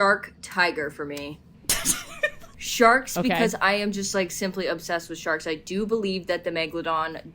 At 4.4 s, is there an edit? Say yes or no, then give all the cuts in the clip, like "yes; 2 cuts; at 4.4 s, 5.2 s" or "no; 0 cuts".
no; 2 cuts; at 1.5 s, 2.5 s